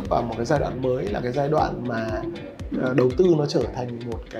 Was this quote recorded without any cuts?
yes; 0 cuts

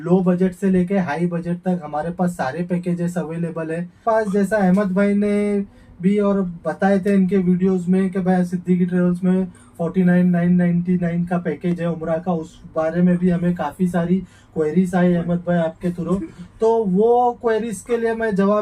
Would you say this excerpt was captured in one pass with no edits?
no; 1 cut; at 4.0 s

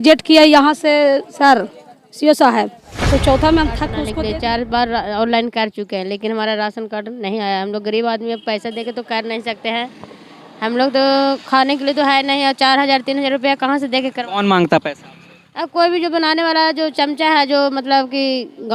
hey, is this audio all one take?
no; 1 cut; at 4.0 s

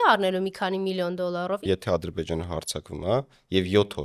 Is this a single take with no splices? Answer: no; 1 cut; at 1.6 s

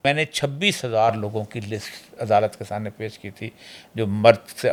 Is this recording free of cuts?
yes; 0 cuts

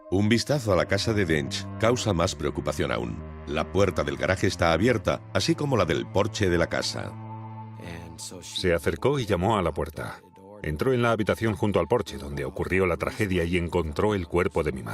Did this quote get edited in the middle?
yes; 1 cut; at 10.5 s

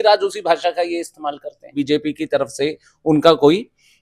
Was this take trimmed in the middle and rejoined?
yes; 1 cut; at 1.8 s

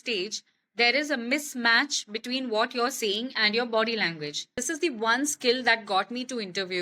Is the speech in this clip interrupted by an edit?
yes; 1 cut; at 4.5 s

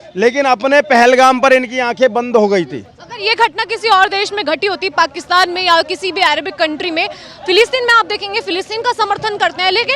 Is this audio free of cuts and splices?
yes; 0 cuts

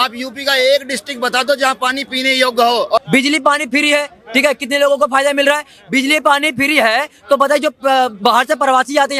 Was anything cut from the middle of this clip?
yes; 1 cut; at 3.0 s

